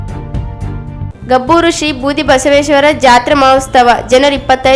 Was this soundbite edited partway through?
no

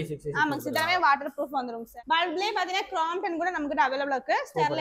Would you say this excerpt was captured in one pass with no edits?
no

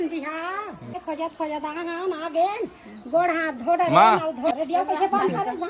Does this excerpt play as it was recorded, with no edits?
no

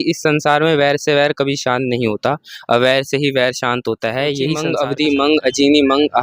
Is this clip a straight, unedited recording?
no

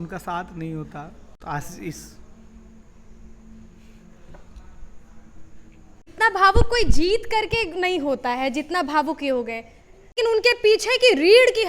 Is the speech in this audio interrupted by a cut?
yes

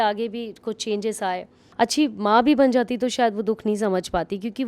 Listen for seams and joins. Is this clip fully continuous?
no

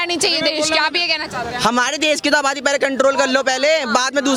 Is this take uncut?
yes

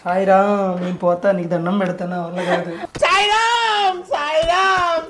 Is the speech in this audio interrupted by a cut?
no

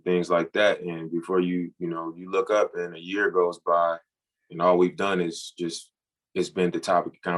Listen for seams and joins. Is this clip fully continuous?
yes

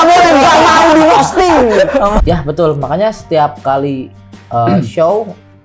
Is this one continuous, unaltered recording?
no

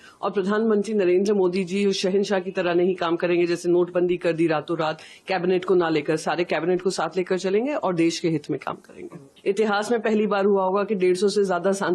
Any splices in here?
yes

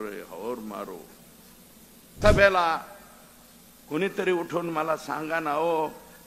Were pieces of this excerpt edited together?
yes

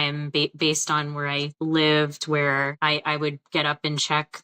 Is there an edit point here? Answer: yes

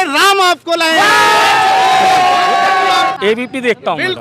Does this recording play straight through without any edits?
no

